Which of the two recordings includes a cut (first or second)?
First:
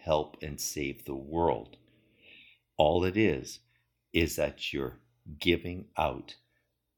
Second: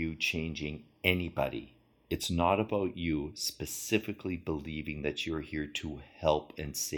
first